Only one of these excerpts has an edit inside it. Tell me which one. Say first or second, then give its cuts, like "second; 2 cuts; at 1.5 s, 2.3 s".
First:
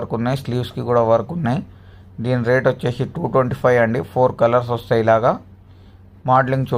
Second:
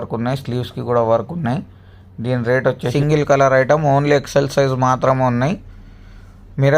second; 1 cut; at 2.9 s